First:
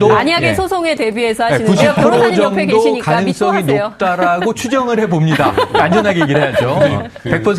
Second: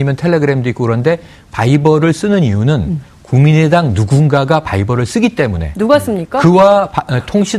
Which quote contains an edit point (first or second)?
second